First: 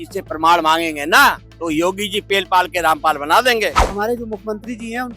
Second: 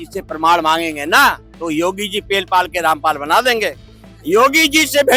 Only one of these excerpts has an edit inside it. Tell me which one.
first; 1 cut; at 3.8 s

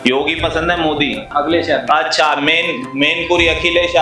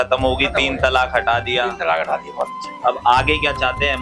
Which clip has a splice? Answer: first; 1 cut; at 1.3 s

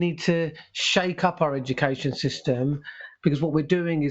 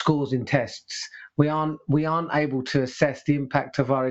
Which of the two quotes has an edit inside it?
first; 1 cut; at 3.0 s

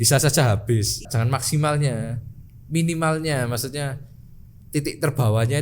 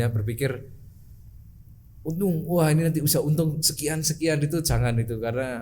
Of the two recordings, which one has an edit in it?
first; 1 cut; at 1.0 s

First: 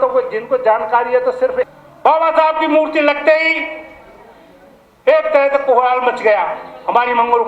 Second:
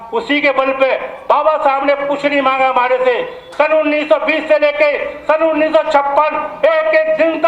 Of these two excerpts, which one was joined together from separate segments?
first; 1 cut; at 1.6 s

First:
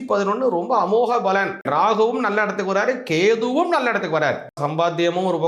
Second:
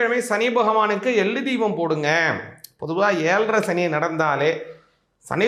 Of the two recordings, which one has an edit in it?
first; 2 cuts; at 1.7 s, 4.6 s

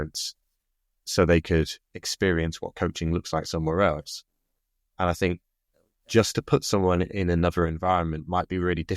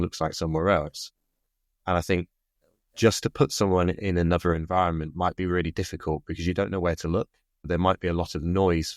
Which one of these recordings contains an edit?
second; 1 cut; at 7.7 s

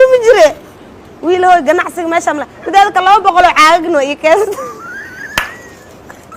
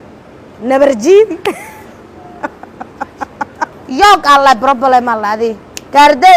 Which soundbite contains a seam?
second; 1 cut; at 3.8 s

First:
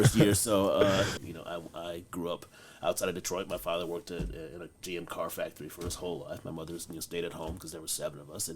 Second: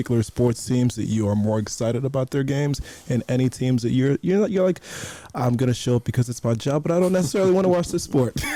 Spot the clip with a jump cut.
first; 1 cut; at 1.3 s

